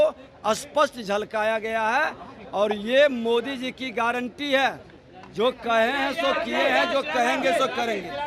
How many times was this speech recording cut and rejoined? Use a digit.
0